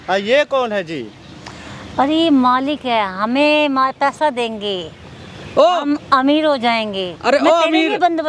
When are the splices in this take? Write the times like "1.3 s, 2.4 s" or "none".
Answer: none

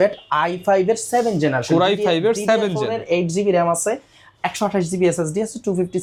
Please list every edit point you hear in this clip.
none

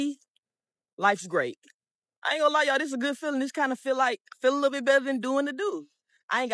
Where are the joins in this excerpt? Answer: none

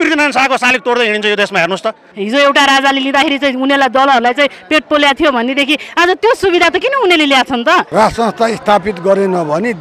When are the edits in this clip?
2.1 s, 7.9 s

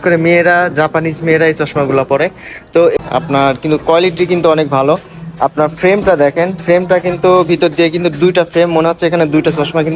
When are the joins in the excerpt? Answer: 2.9 s

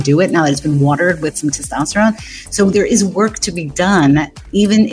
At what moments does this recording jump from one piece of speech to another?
none

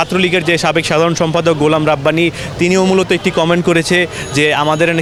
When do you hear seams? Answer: none

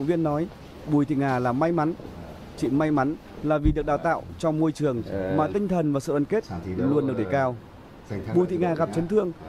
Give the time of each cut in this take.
6.8 s

